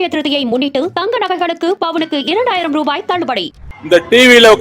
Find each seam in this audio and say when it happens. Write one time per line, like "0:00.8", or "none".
0:03.6